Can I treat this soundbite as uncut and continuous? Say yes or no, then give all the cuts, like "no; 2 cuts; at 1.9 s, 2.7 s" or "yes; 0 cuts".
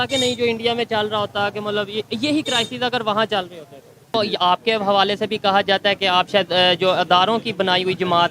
no; 1 cut; at 4.1 s